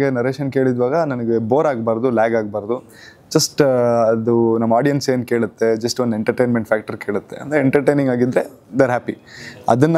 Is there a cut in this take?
no; 0 cuts

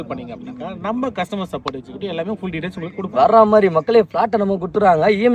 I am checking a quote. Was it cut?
no; 0 cuts

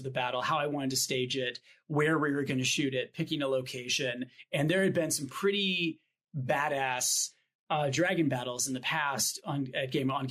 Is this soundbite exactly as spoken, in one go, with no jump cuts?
no; 1 cut; at 4.4 s

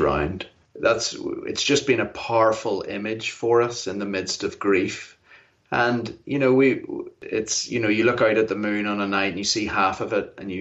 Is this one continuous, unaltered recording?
no; 1 cut; at 7.2 s

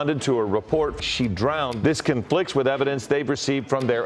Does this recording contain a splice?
no; 0 cuts

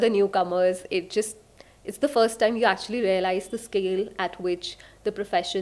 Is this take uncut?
yes; 0 cuts

